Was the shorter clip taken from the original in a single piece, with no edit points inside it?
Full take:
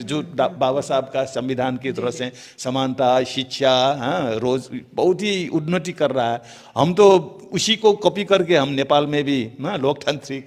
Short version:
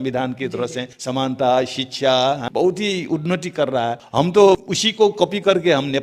no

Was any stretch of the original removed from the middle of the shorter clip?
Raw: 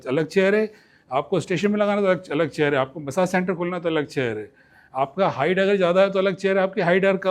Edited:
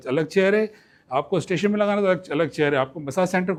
no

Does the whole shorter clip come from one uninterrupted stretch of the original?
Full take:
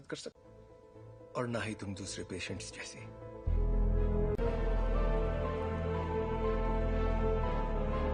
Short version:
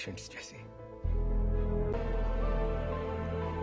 no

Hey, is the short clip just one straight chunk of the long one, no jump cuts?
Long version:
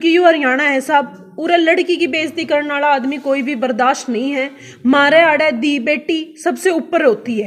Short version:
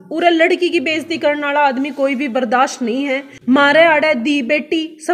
no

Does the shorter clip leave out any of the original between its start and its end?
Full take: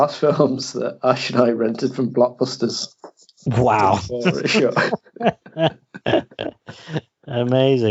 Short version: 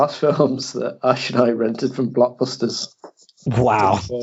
no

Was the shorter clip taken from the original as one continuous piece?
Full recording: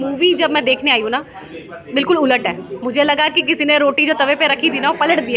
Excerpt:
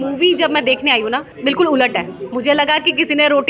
no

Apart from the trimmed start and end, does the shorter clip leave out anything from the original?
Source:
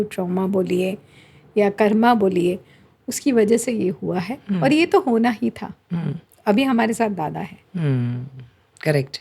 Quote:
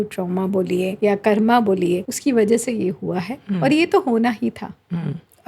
yes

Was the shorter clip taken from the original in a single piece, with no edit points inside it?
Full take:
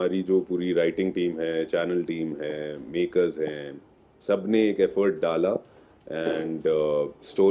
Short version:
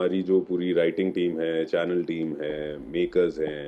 yes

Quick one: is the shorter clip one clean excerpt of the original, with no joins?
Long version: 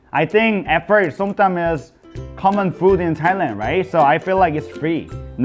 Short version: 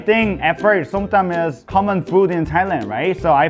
no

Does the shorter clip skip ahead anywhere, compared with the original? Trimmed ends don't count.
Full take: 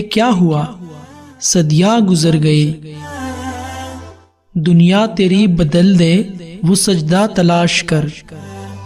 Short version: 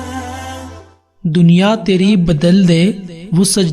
no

